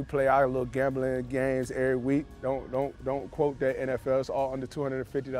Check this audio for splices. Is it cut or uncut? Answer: uncut